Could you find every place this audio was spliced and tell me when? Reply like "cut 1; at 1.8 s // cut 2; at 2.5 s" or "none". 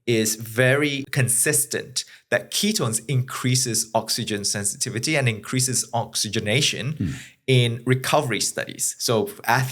cut 1; at 1.1 s